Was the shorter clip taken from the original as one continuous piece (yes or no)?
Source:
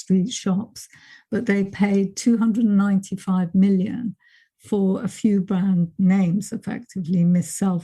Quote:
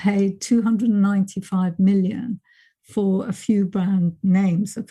yes